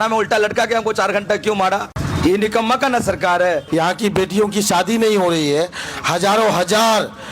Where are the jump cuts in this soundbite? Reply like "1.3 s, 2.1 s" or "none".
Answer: 2.0 s, 3.6 s